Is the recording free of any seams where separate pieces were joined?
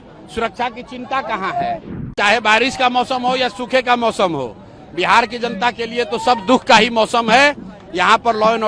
no; 1 cut; at 2.0 s

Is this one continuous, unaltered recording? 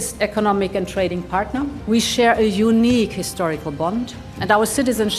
no; 1 cut; at 1.8 s

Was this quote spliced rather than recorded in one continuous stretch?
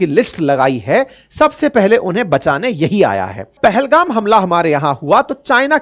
yes; 1 cut; at 3.6 s

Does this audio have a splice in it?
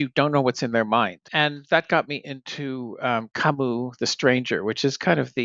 yes; 1 cut; at 1.2 s

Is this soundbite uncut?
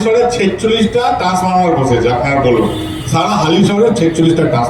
yes; 0 cuts

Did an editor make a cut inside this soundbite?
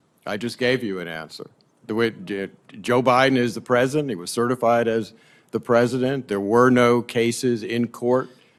no; 0 cuts

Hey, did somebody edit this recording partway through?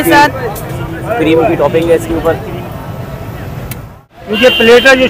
yes; 1 cut; at 4.2 s

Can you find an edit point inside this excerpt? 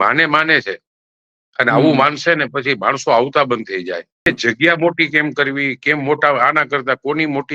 yes; 1 cut; at 4.3 s

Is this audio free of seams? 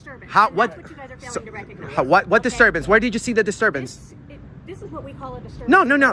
yes; 0 cuts

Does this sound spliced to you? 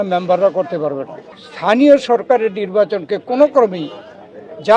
yes; 1 cut; at 1.8 s

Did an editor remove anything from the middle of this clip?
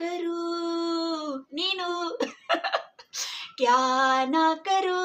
no; 0 cuts

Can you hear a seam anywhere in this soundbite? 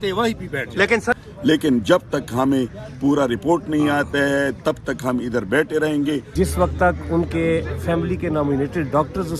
yes; 2 cuts; at 1.1 s, 6.3 s

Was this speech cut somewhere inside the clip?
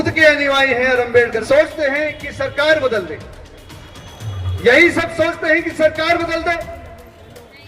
yes; 1 cut; at 1.4 s

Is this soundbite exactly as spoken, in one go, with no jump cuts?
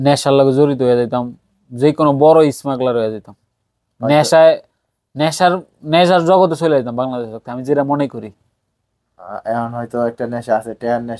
yes; 0 cuts

